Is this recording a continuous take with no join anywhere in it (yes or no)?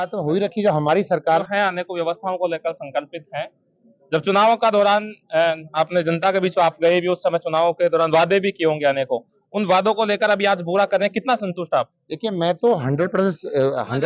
no